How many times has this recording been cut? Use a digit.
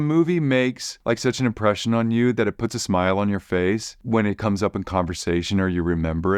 2